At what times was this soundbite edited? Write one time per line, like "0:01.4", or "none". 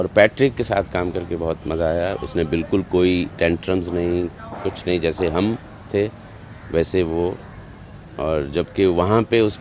none